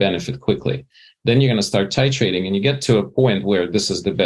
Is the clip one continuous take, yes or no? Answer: yes